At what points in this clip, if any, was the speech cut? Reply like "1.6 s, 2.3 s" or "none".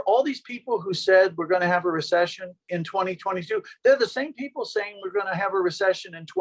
2.8 s